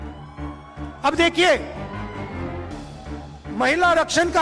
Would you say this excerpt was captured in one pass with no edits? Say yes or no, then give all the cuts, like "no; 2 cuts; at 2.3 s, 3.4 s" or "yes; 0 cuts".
no; 3 cuts; at 0.9 s, 2.1 s, 3.6 s